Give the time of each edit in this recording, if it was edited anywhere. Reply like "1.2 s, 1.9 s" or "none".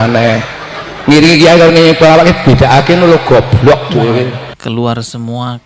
4.5 s